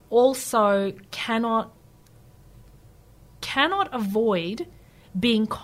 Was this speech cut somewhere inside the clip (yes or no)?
no